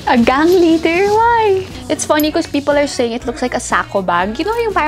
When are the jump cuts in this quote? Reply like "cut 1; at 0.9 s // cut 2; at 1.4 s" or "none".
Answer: cut 1; at 1.7 s